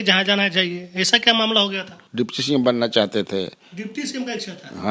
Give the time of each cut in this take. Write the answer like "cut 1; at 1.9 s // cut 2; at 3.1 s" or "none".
cut 1; at 2.0 s